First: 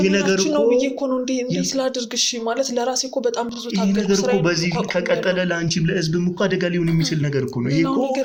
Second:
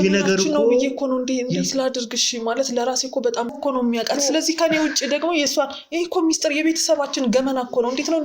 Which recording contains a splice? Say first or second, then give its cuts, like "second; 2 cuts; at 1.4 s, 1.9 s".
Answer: second; 1 cut; at 3.6 s